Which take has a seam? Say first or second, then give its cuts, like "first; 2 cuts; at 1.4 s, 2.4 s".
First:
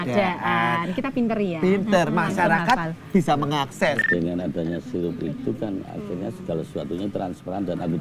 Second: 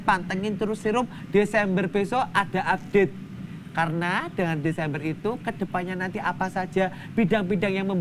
first; 1 cut; at 4.0 s